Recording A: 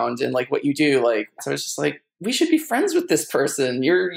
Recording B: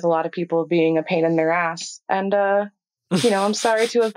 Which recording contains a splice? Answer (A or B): A